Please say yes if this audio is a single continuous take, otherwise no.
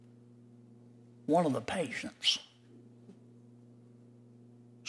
yes